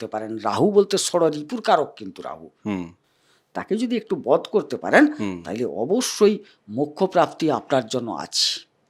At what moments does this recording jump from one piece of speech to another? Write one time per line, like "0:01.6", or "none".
none